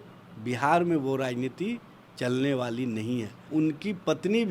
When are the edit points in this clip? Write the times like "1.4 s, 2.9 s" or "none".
3.4 s